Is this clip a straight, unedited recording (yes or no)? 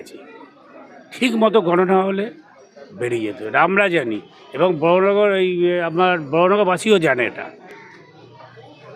yes